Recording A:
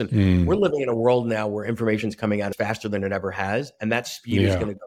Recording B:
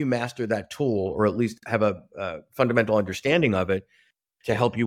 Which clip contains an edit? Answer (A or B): A